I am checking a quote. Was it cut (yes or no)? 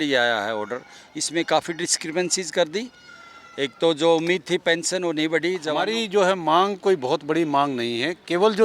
yes